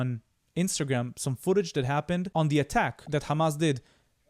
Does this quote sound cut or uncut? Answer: cut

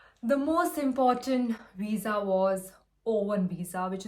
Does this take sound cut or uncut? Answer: uncut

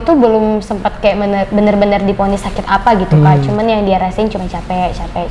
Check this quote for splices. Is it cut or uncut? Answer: uncut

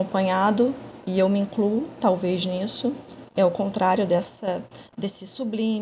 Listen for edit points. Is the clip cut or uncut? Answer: cut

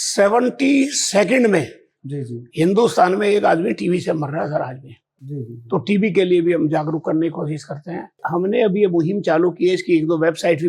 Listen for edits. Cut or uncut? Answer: uncut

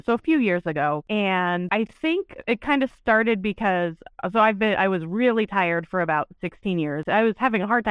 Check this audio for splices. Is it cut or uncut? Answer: cut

